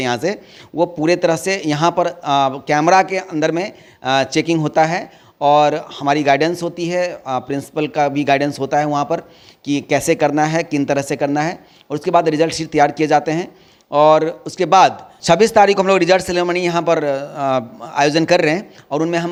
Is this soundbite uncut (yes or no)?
yes